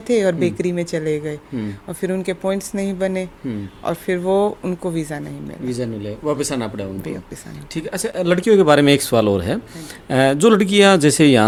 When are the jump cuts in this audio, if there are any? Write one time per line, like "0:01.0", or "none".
none